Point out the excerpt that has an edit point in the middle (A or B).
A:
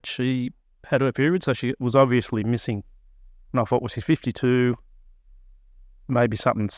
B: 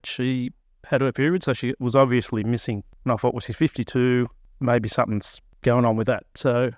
B